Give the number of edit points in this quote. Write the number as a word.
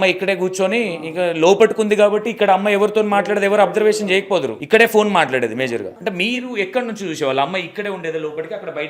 two